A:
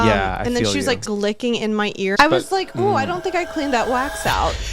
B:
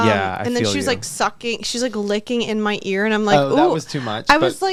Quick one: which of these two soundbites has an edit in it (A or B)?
A